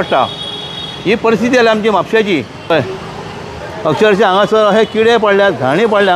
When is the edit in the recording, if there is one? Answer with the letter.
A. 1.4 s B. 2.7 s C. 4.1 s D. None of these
B